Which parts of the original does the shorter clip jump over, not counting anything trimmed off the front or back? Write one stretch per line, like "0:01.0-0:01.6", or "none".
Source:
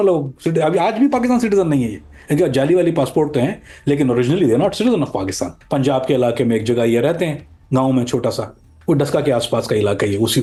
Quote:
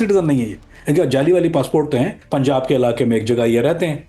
0:03.6-0:05.6